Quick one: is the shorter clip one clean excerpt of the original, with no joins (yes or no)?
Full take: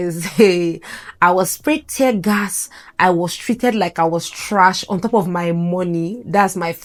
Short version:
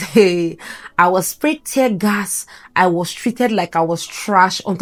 yes